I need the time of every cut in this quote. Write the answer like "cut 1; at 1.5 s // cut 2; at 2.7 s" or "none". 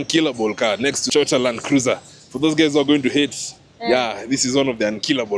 cut 1; at 1.0 s